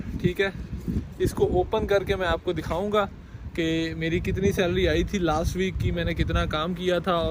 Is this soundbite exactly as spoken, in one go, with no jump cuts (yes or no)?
yes